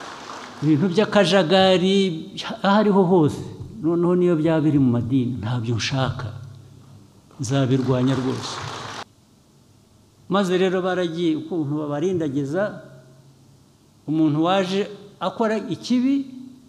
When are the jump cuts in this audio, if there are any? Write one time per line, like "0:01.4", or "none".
0:09.0